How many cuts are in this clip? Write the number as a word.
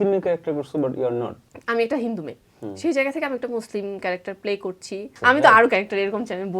two